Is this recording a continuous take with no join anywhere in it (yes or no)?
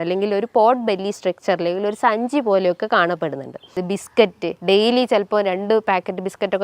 no